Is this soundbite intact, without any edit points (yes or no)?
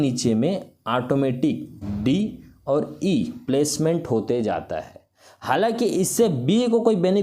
yes